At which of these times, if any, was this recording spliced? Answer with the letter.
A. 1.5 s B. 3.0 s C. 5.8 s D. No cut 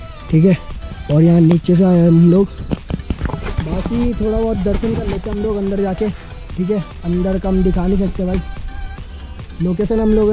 D